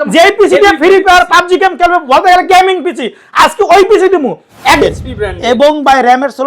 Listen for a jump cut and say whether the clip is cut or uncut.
cut